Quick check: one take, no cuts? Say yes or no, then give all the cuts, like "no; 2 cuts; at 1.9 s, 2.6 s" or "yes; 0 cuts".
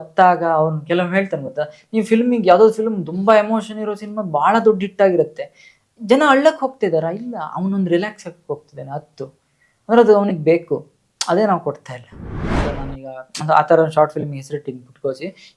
no; 1 cut; at 12.6 s